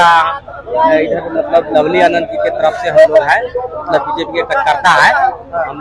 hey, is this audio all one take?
yes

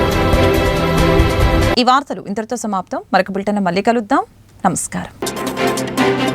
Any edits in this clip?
no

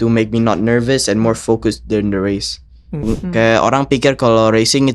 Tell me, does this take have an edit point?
yes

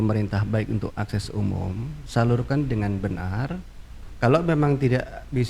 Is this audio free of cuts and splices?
no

